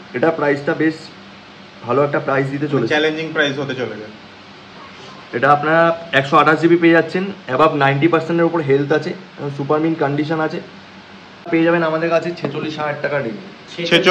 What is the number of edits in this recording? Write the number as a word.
one